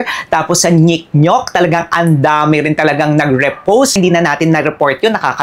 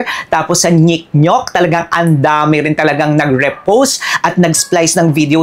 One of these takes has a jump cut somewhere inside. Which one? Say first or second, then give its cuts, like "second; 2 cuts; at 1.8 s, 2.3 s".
first; 1 cut; at 3.9 s